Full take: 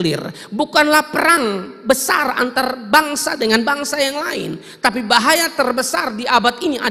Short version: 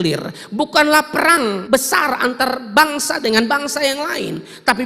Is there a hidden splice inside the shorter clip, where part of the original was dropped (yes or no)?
yes